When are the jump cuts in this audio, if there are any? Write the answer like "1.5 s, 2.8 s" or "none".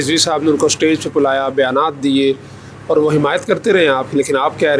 none